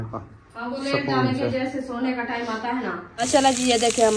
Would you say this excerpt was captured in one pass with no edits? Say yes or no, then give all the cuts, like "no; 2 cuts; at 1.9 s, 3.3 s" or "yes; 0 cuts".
no; 1 cut; at 3.2 s